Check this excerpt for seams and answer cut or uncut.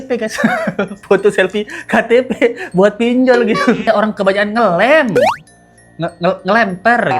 cut